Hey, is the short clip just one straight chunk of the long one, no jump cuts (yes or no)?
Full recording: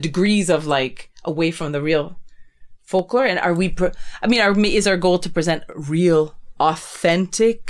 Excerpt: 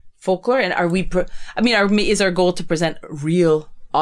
yes